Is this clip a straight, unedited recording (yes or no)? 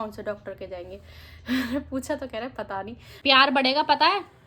no